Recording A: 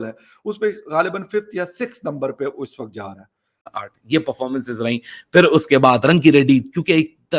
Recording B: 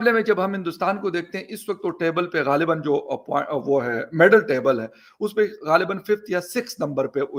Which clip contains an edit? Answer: A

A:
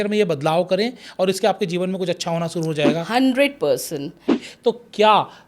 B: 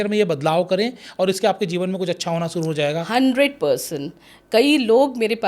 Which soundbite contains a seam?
A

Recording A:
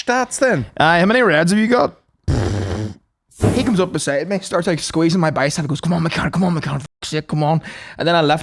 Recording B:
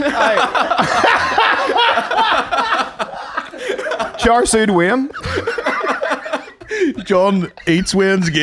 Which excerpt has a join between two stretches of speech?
A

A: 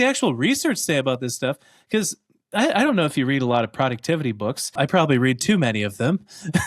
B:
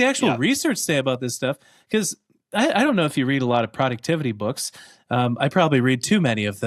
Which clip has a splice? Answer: A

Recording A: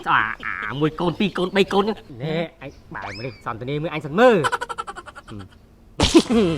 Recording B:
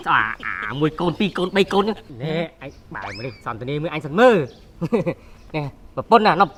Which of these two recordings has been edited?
A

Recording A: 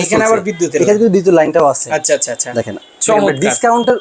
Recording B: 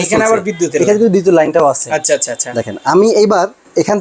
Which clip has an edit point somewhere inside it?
A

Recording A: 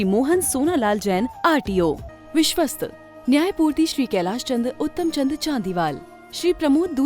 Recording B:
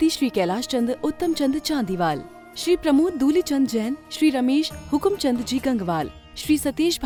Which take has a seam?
A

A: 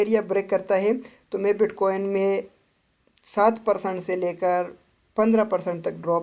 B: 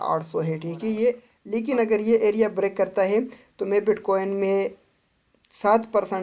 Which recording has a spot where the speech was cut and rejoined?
B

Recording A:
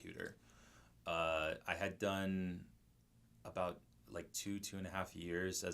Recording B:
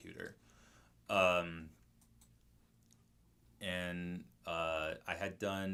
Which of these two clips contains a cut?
A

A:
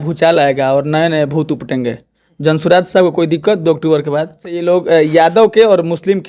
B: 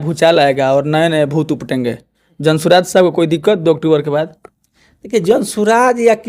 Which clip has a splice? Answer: A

